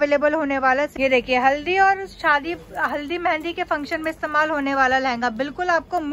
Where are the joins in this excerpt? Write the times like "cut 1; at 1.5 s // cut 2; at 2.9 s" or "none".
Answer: cut 1; at 0.9 s